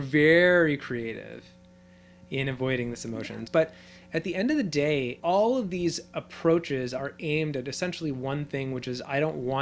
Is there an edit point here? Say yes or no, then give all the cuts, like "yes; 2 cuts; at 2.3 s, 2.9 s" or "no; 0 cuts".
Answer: yes; 1 cut; at 3.4 s